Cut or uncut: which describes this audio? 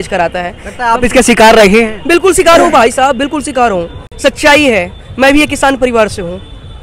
uncut